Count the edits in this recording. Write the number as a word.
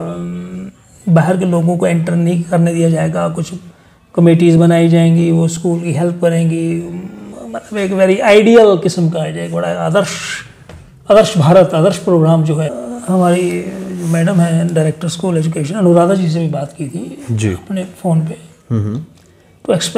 one